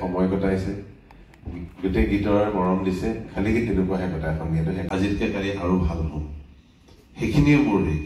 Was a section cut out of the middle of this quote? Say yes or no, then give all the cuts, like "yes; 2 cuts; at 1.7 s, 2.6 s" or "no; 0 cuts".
yes; 1 cut; at 4.8 s